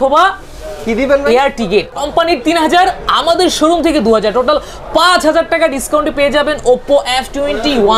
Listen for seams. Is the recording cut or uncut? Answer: cut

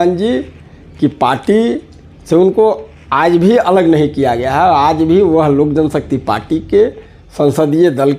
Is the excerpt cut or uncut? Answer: uncut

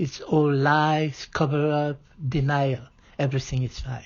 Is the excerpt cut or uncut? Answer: uncut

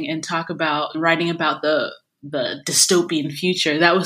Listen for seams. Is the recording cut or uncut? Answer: uncut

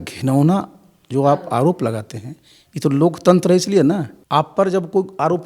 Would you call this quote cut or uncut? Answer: cut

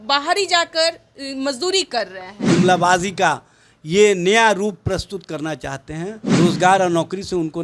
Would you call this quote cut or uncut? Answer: cut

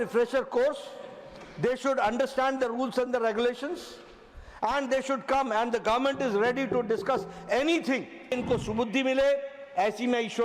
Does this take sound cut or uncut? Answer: cut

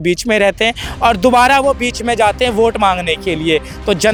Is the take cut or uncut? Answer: uncut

